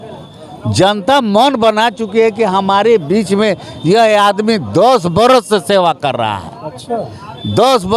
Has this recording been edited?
no; 0 cuts

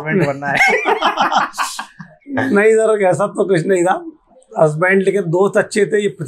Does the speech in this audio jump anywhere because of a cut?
no; 0 cuts

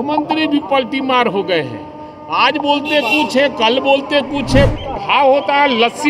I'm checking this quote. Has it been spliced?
yes; 1 cut; at 4.7 s

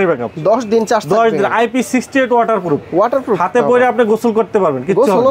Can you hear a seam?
no; 0 cuts

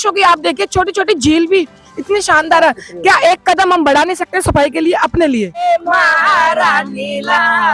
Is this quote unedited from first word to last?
no; 1 cut; at 5.6 s

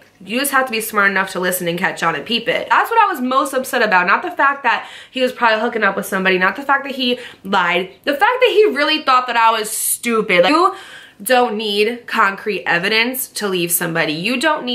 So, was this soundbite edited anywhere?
yes; 2 cuts; at 2.6 s, 10.5 s

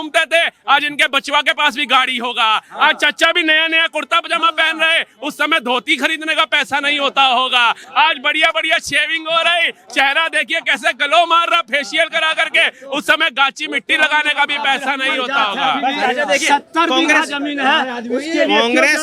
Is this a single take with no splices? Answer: yes; 0 cuts

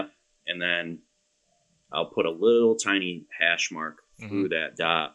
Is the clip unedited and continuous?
yes; 0 cuts

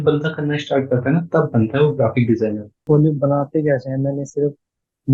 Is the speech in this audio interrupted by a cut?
yes; 1 cut; at 2.8 s

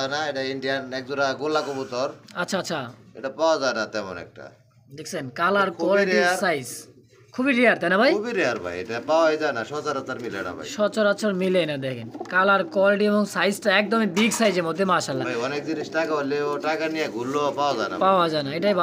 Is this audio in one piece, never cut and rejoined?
yes; 0 cuts

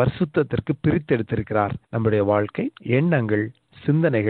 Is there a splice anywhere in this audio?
yes; 2 cuts; at 1.8 s, 2.8 s

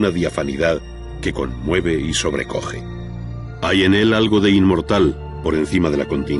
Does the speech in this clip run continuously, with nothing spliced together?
yes; 0 cuts

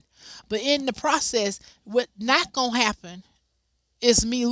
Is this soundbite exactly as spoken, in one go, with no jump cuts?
yes; 0 cuts

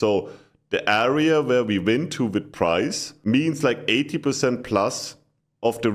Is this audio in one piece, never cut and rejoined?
no; 1 cut; at 3.1 s

